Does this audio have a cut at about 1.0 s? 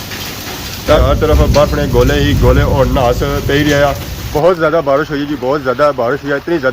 yes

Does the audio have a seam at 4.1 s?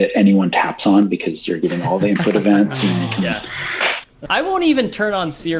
yes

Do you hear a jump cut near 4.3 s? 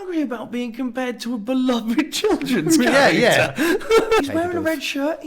yes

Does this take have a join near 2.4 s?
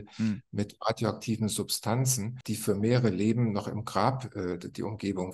yes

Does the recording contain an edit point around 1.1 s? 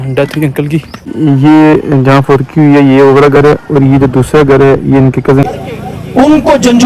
yes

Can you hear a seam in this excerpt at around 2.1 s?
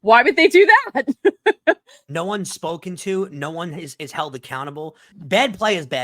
no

